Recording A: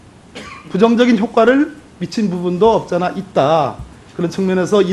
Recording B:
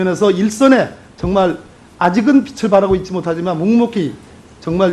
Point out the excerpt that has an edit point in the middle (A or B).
B